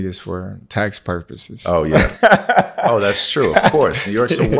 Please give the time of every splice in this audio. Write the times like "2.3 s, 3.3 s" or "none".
none